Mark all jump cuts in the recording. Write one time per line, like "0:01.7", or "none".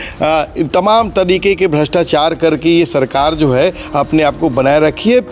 none